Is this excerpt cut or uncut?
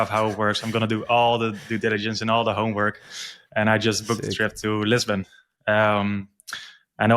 uncut